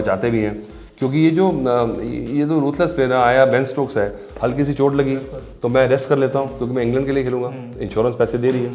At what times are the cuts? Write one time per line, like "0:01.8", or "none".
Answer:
none

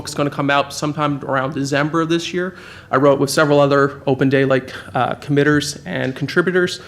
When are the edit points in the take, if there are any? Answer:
0:01.9

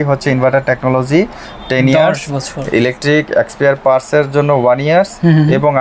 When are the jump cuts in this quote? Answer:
none

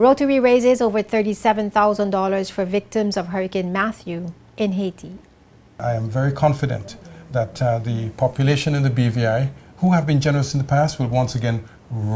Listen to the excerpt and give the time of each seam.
0:05.8

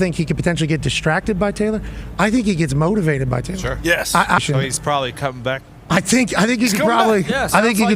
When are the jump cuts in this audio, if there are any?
0:04.4

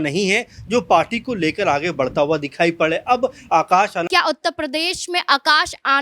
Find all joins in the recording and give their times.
0:04.1

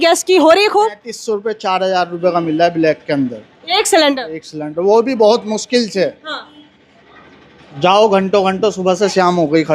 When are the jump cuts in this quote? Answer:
none

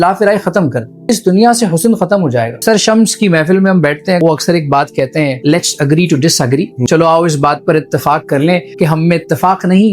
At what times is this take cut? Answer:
0:01.1
0:02.6
0:04.2
0:05.4
0:06.8
0:08.7

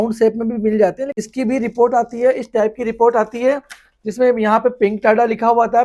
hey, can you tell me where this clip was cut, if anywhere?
0:01.2

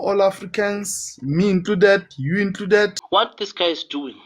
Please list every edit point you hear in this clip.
0:03.0

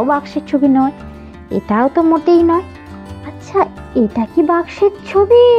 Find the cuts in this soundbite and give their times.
none

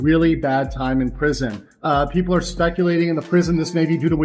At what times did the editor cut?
0:01.7

